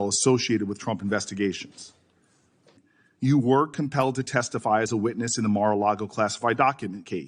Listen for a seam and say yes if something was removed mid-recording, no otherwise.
yes